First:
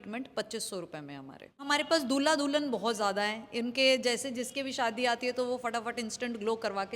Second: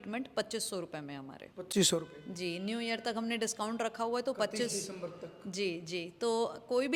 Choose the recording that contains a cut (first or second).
first